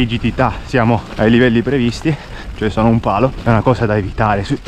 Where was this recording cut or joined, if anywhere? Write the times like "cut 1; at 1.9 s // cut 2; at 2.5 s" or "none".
cut 1; at 1.1 s // cut 2; at 3.4 s